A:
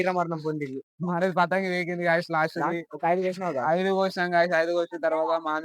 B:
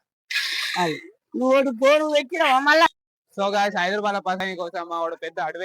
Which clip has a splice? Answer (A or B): B